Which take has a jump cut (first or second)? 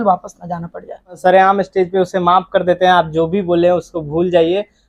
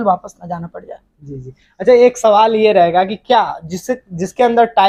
first